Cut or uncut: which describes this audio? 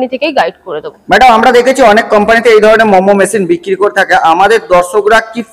uncut